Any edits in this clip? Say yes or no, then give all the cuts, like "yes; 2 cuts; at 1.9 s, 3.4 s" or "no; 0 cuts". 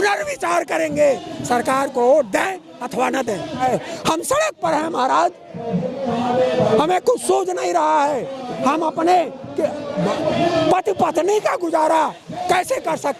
yes; 1 cut; at 3.6 s